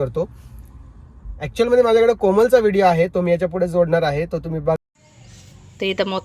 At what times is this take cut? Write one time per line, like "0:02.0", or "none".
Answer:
0:04.8